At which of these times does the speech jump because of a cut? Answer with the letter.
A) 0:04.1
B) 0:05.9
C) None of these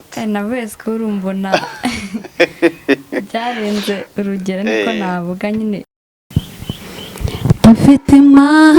B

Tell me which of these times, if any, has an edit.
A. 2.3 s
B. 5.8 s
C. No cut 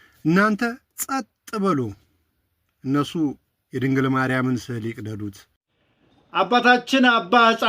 B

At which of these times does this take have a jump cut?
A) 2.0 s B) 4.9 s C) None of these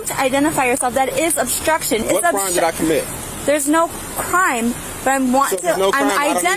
A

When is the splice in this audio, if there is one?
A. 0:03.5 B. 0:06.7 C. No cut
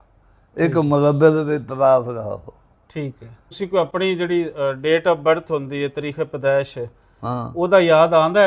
A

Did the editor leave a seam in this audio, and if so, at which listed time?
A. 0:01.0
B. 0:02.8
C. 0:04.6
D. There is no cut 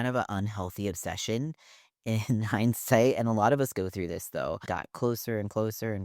C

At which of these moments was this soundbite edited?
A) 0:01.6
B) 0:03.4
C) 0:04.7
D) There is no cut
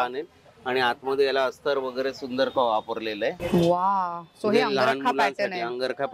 B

